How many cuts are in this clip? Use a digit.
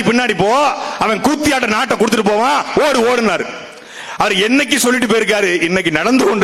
0